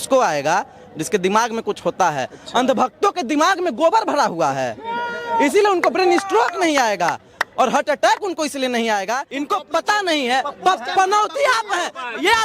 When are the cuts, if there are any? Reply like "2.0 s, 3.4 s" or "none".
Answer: 9.3 s